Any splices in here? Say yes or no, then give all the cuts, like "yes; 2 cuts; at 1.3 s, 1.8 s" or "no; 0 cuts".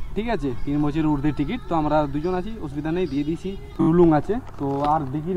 yes; 1 cut; at 3.9 s